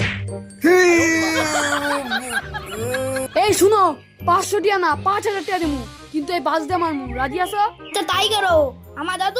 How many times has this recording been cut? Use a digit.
2